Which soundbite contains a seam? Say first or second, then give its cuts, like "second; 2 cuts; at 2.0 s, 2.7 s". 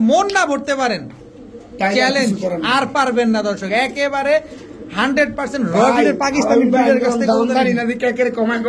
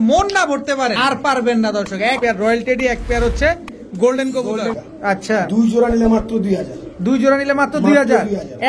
second; 3 cuts; at 1.0 s, 2.2 s, 4.9 s